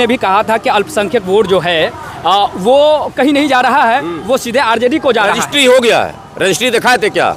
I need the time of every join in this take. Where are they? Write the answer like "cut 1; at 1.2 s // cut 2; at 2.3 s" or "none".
none